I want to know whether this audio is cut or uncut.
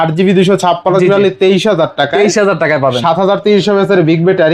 uncut